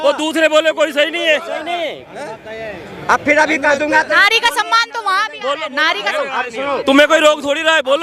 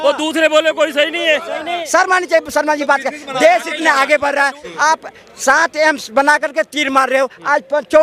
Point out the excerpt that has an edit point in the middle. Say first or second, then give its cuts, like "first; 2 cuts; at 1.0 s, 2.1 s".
second; 2 cuts; at 1.8 s, 4.7 s